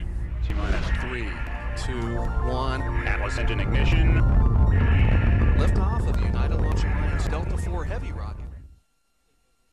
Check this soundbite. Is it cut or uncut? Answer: cut